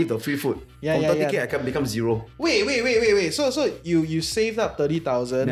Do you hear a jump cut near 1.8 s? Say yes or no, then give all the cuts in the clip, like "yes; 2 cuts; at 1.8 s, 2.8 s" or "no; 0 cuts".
no; 0 cuts